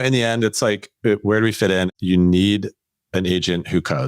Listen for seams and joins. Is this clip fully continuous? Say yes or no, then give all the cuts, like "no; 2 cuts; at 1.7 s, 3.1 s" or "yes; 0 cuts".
no; 1 cut; at 1.9 s